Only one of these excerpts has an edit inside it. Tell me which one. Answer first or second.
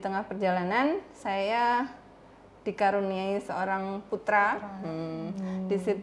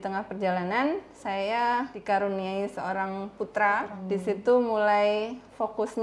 second